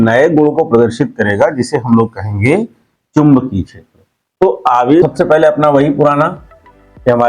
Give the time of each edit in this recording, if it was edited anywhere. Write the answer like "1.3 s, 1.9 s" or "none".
5.0 s